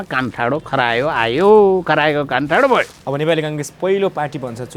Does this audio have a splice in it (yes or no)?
yes